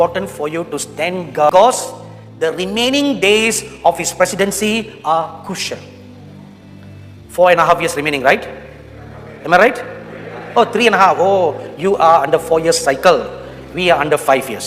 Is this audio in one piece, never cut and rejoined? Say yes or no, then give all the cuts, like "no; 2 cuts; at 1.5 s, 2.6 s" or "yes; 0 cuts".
no; 1 cut; at 1.5 s